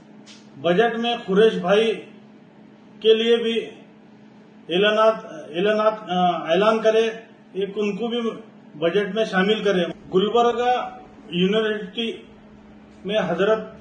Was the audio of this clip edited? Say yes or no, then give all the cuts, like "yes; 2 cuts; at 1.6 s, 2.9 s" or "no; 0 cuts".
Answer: yes; 1 cut; at 9.9 s